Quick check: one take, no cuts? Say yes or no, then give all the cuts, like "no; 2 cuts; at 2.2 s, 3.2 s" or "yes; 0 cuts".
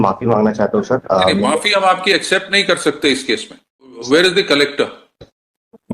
no; 1 cut; at 4.0 s